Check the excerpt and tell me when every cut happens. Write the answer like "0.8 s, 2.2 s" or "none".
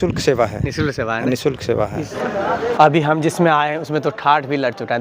2.2 s